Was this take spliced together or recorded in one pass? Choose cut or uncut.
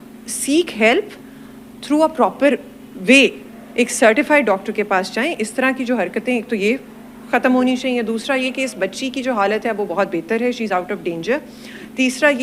uncut